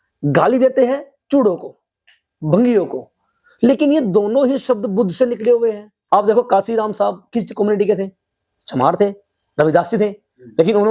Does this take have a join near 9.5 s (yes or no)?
no